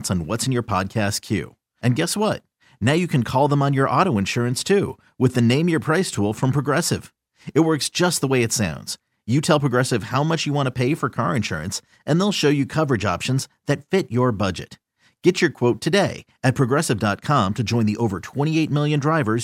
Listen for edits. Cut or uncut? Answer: uncut